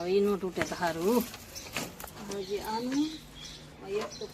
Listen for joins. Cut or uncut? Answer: uncut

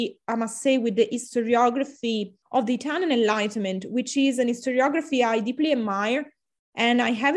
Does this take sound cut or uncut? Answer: cut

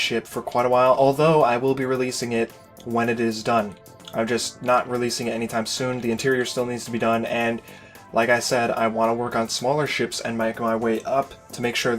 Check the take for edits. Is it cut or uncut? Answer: cut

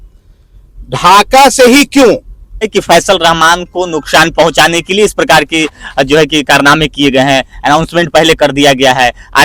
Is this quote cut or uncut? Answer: cut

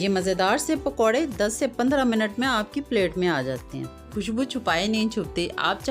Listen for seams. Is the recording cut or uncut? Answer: cut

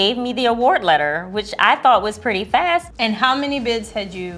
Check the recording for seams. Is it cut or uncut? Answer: cut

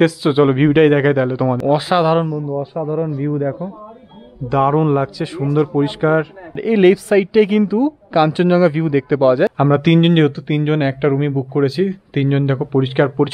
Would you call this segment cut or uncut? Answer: cut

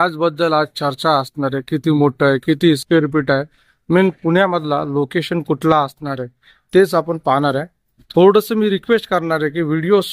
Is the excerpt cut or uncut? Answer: uncut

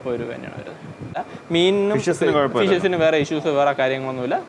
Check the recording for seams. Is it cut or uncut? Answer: cut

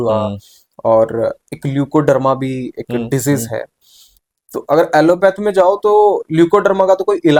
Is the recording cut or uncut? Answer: uncut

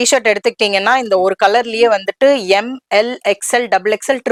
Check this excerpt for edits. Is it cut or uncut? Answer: uncut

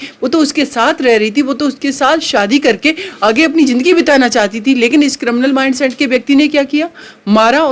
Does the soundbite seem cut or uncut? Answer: uncut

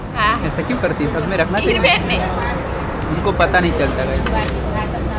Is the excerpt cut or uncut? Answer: uncut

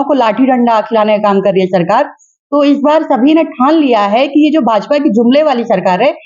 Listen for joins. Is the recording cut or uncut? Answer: uncut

